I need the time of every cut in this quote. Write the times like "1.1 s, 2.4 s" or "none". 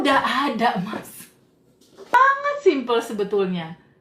2.1 s